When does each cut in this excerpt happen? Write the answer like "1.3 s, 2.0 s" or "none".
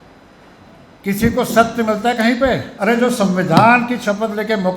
2.7 s